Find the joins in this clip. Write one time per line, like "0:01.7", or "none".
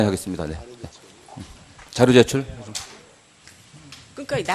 0:02.6